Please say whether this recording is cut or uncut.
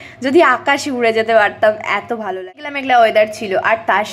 cut